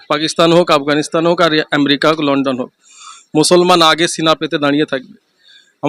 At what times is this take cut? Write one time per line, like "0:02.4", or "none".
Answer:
none